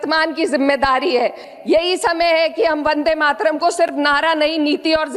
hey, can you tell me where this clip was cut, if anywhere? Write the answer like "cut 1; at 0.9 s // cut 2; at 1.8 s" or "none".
cut 1; at 1.5 s